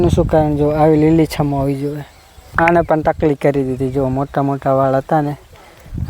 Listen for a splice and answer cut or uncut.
cut